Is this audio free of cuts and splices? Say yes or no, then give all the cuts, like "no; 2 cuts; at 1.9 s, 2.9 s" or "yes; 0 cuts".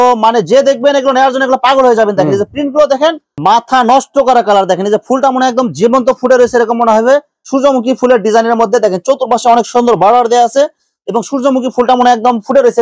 no; 2 cuts; at 3.3 s, 7.4 s